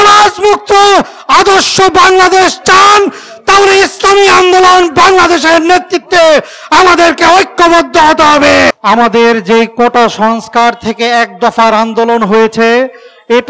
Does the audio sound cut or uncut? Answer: cut